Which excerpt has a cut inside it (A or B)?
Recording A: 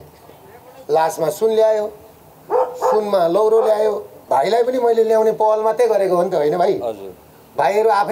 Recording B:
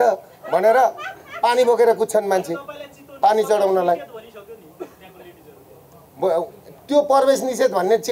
A